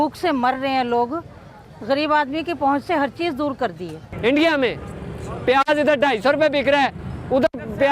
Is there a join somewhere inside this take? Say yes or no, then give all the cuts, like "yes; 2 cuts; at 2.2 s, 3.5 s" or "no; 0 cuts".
yes; 1 cut; at 4.1 s